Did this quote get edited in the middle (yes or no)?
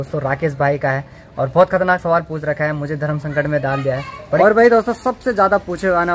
yes